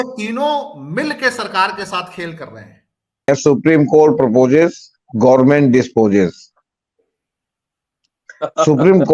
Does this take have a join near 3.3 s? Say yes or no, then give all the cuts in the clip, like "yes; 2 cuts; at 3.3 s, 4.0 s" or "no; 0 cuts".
yes; 1 cut; at 3.3 s